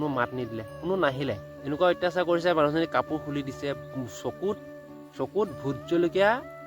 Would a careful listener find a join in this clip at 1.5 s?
yes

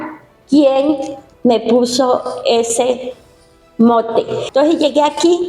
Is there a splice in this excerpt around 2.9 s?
no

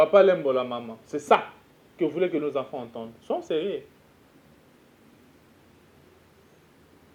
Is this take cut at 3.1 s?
no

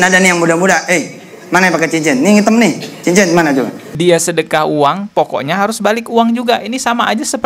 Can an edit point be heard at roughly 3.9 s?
yes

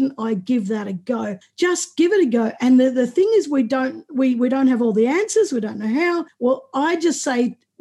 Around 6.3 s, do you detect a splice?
yes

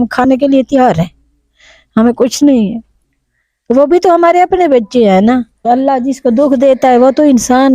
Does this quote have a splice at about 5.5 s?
yes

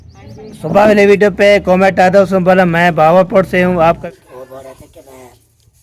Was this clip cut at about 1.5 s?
no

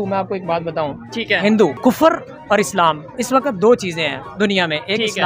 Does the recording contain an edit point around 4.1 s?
no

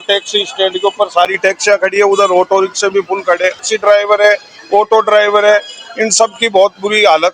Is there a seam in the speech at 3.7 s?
yes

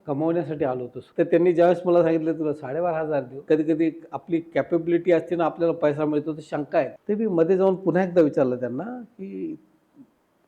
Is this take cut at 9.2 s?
no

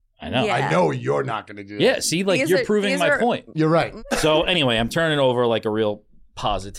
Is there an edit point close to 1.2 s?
no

